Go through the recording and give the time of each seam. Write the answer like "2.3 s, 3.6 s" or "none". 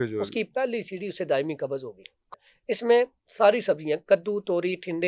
2.2 s